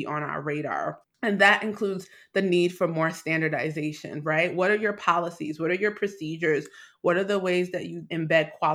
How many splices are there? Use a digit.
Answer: 1